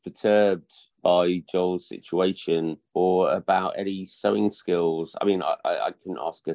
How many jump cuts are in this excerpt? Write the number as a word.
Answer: zero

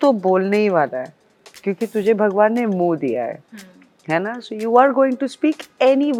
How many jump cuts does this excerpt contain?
zero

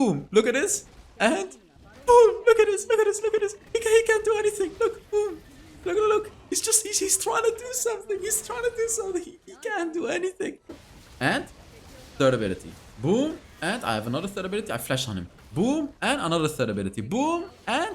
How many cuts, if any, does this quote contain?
one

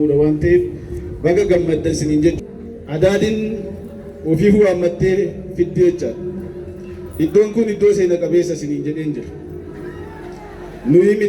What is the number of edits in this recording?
one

